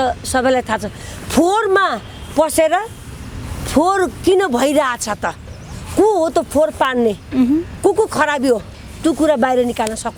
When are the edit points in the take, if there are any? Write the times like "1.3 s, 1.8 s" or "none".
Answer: none